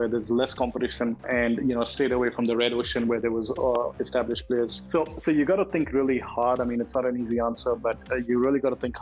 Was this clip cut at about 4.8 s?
yes; 2 cuts; at 1.2 s, 4.8 s

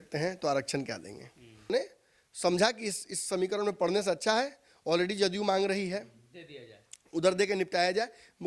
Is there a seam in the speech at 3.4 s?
no; 1 cut; at 1.7 s

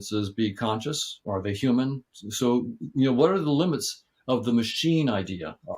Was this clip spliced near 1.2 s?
yes; 1 cut; at 1.2 s

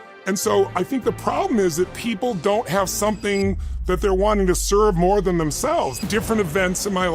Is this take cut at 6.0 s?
yes; 1 cut; at 6.0 s

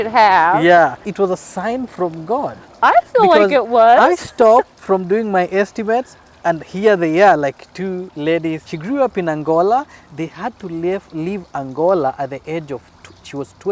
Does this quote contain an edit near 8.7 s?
yes; 2 cuts; at 1.1 s, 8.7 s

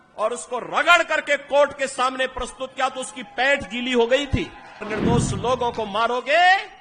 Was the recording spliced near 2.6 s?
no; 1 cut; at 4.9 s

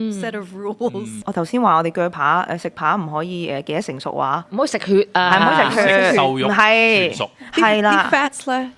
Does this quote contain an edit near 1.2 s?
yes; 1 cut; at 1.2 s

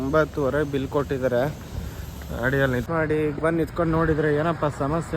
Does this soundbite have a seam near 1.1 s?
no; 1 cut; at 2.8 s

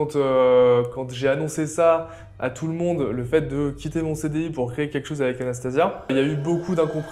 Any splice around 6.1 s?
yes; 1 cut; at 6.1 s

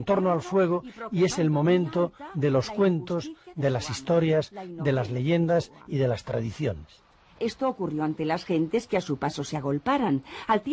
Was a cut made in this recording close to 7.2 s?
no; 0 cuts

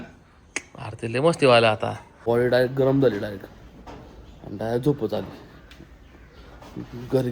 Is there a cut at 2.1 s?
yes; 1 cut; at 2.1 s

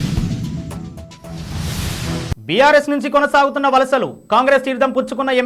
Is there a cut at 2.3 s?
yes; 1 cut; at 2.3 s

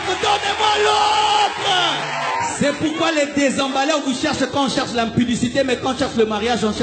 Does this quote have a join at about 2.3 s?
yes; 1 cut; at 2.3 s

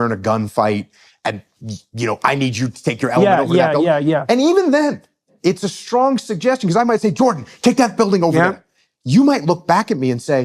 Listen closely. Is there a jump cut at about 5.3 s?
yes; 1 cut; at 5.3 s

